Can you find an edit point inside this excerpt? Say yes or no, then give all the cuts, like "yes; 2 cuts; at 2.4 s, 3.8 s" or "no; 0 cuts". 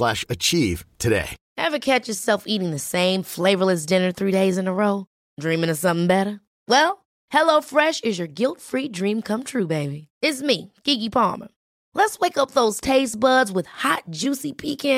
yes; 1 cut; at 1.4 s